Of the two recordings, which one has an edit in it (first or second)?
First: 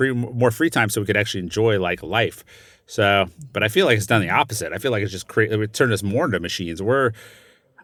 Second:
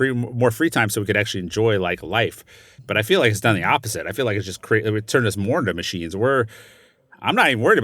second